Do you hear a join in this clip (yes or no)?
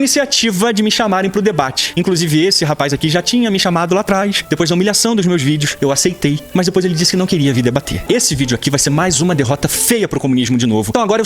yes